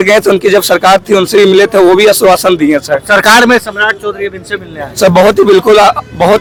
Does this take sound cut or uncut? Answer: uncut